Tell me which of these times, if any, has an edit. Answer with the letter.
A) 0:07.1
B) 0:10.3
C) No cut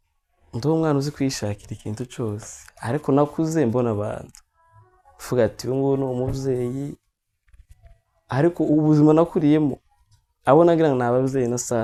C